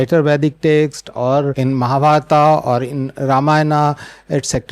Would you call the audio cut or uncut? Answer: cut